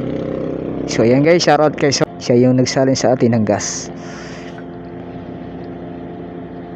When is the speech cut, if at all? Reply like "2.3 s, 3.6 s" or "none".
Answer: 2.0 s